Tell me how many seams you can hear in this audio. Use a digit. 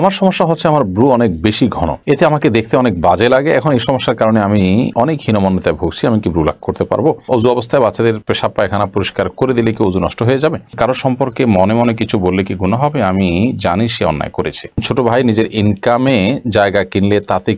3